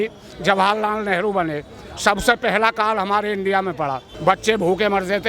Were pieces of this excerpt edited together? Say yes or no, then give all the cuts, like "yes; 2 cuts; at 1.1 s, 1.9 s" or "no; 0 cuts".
yes; 1 cut; at 4.1 s